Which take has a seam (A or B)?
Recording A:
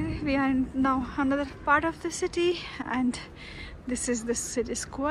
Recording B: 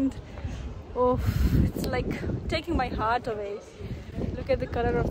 A